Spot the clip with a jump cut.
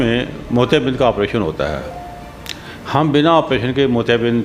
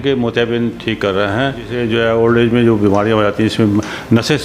second; 1 cut; at 1.8 s

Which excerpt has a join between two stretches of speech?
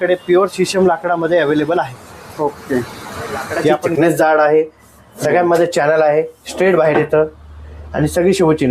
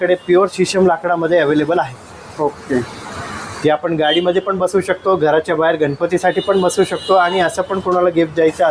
first; 1 cut; at 3.9 s

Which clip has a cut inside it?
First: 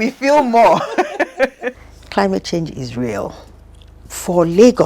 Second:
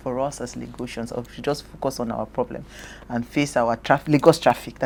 first; 2 cuts; at 1.9 s, 3.9 s

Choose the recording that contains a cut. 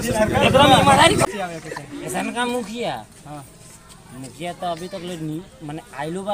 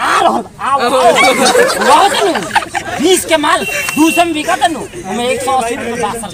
first; 1 cut; at 1.2 s

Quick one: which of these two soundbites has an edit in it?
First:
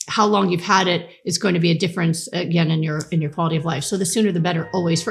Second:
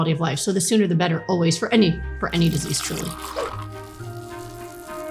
second; 1 cut; at 3.1 s

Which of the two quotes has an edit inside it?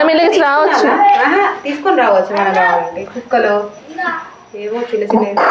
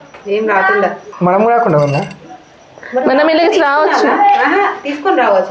second; 1 cut; at 1.1 s

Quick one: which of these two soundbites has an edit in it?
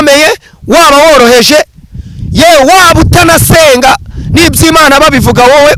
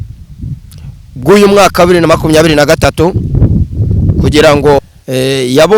second; 1 cut; at 4.8 s

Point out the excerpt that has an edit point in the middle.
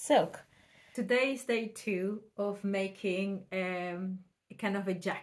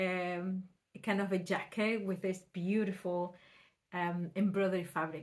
first; 1 cut; at 0.9 s

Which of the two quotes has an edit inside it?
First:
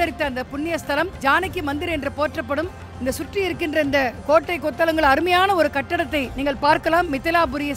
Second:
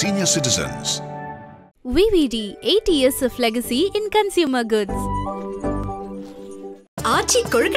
first; 3 cuts; at 1.1 s, 4.2 s, 6.3 s

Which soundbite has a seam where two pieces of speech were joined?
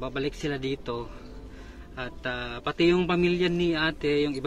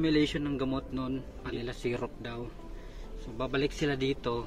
second; 1 cut; at 1.4 s

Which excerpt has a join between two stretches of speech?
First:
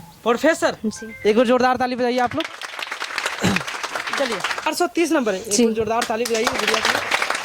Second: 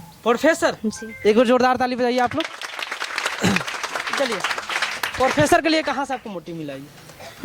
first; 1 cut; at 4.7 s

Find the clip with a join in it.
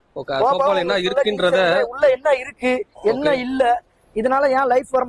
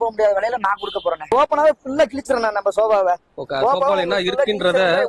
second; 1 cut; at 1.3 s

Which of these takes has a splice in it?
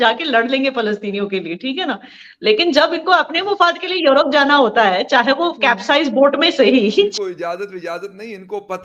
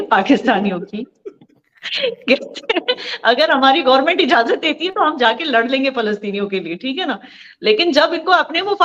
first; 1 cut; at 7.1 s

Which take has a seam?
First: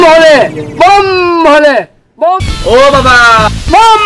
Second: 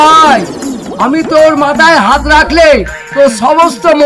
first; 1 cut; at 2.5 s

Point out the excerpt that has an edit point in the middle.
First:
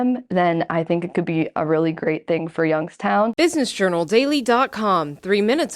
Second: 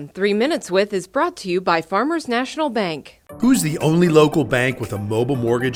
first; 1 cut; at 3.3 s

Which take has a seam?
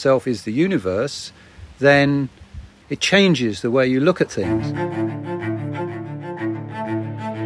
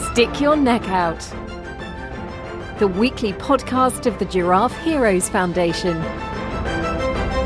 first; 1 cut; at 4.5 s

